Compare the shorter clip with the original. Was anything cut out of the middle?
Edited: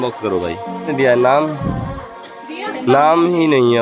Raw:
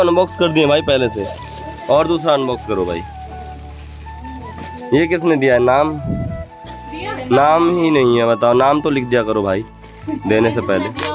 yes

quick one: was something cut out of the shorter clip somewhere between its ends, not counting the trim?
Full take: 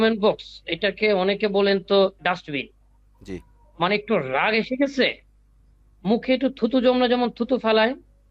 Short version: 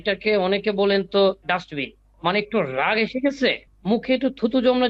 yes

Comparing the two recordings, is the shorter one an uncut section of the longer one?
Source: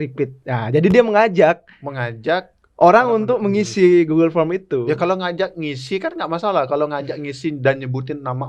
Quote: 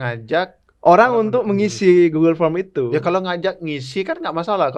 yes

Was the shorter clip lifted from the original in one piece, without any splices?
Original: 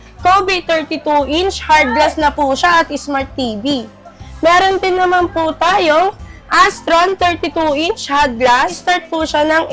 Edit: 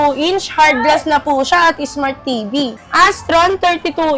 no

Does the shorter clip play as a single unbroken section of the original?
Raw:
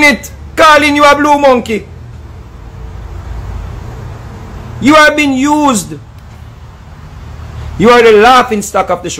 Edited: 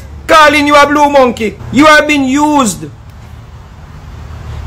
no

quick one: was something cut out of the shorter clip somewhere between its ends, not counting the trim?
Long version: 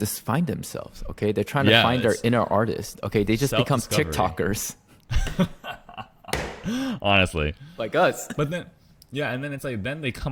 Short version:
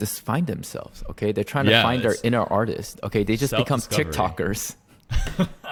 no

